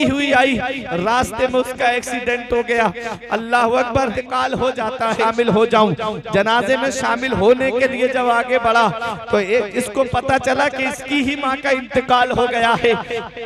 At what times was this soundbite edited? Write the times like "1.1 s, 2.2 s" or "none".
4.1 s, 5.2 s